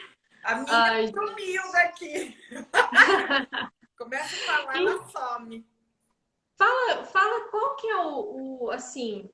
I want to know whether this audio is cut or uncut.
cut